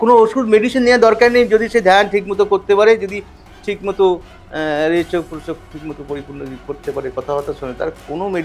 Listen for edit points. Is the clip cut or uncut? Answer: uncut